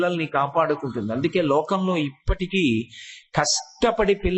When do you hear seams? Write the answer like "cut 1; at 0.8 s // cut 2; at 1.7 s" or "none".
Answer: none

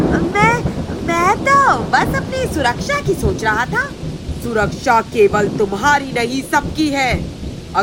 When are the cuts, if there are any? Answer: none

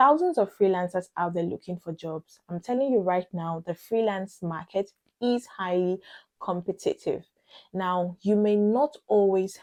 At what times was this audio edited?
none

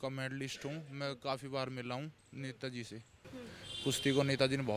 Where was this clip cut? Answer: cut 1; at 3.2 s

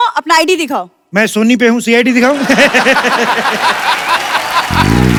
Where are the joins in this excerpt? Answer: none

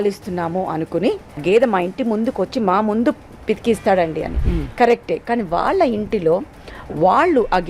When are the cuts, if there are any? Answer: cut 1; at 1.4 s

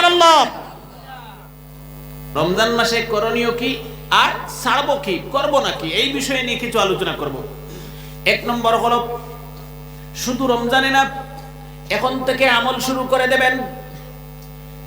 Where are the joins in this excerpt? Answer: cut 1; at 2.1 s

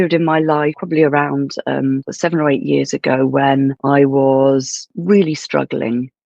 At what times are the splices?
cut 1; at 0.8 s // cut 2; at 2.1 s // cut 3; at 3.8 s // cut 4; at 5.0 s

